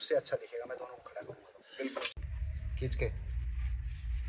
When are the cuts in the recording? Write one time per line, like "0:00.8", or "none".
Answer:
0:02.1